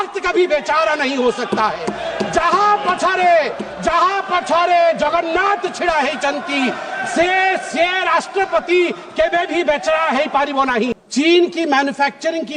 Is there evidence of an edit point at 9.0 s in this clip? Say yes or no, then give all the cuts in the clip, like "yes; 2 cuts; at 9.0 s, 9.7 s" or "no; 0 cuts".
no; 1 cut; at 11.0 s